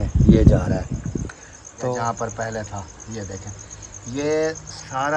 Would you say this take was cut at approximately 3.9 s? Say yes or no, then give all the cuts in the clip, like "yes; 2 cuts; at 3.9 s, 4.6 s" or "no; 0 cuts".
no; 1 cut; at 1.9 s